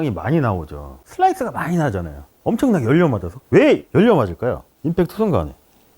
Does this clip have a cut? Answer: yes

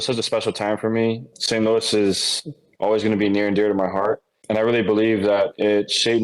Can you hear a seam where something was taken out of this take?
yes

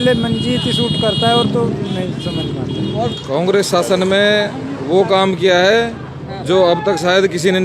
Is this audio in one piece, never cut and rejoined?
no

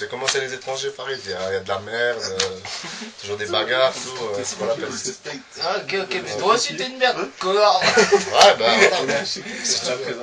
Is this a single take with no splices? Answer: yes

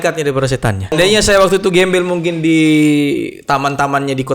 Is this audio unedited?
no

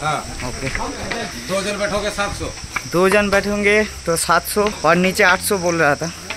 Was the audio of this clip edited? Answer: yes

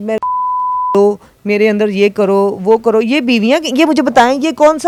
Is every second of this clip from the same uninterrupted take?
yes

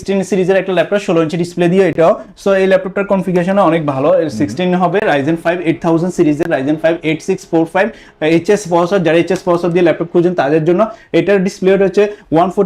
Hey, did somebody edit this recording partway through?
no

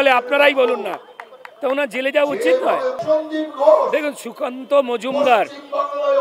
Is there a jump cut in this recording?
no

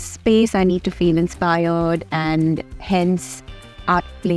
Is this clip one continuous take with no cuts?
yes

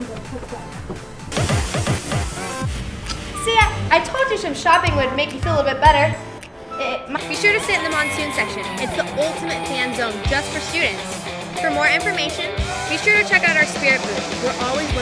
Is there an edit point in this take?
no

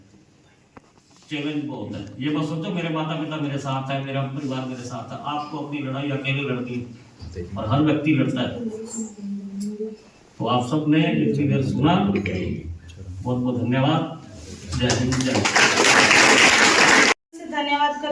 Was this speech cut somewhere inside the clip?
no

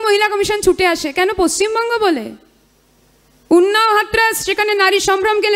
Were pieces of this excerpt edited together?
no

